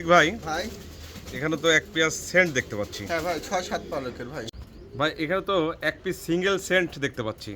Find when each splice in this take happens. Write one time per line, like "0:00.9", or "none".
0:04.5